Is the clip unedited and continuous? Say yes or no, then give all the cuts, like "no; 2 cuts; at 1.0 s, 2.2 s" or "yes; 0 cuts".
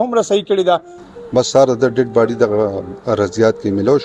no; 1 cut; at 1.0 s